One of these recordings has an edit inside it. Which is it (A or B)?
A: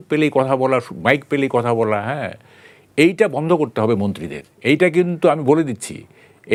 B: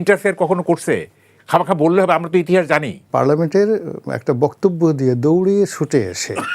B